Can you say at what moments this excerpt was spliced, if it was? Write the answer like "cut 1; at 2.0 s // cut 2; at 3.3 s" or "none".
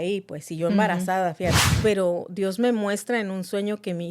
cut 1; at 1.6 s

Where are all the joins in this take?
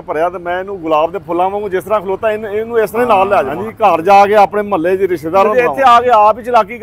cut 1; at 3.6 s // cut 2; at 5.5 s

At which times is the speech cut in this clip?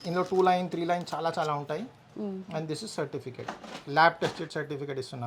none

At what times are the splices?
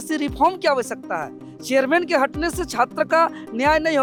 none

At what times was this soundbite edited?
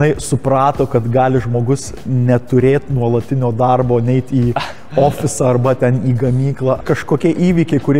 cut 1; at 6.8 s

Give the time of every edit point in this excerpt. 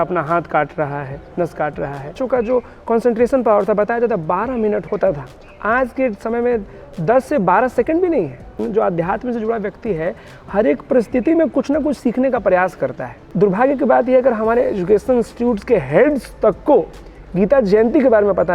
cut 1; at 2.2 s // cut 2; at 4.8 s // cut 3; at 8.6 s // cut 4; at 13.2 s

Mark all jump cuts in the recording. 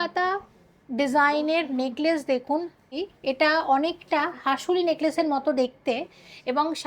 cut 1; at 2.9 s

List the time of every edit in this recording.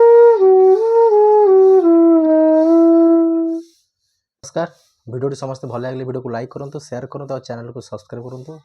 cut 1; at 4.5 s

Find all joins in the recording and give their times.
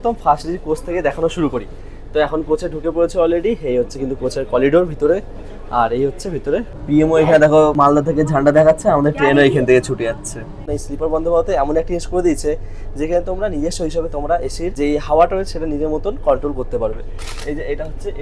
cut 1; at 6.8 s // cut 2; at 7.7 s // cut 3; at 10.6 s // cut 4; at 14.7 s

